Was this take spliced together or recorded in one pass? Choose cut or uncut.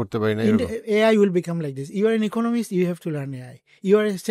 uncut